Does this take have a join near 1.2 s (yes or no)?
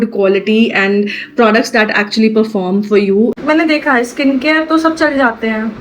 no